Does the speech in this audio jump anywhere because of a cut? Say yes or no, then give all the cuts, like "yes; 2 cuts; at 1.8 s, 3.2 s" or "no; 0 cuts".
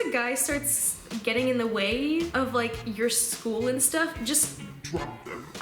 yes; 1 cut; at 1.1 s